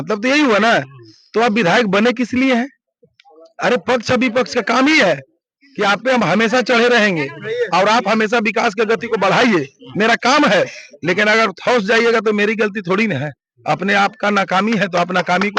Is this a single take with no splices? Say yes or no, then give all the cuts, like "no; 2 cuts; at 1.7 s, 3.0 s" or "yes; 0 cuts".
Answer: yes; 0 cuts